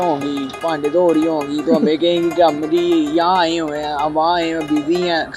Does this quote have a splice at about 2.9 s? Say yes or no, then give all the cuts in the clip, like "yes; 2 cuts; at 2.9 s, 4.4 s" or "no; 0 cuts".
no; 0 cuts